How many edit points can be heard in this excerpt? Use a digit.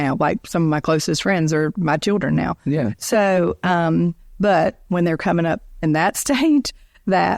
0